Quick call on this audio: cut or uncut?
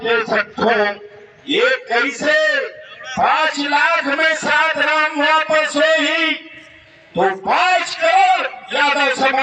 uncut